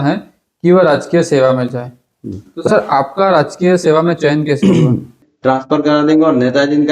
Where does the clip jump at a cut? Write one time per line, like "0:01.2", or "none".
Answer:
0:05.2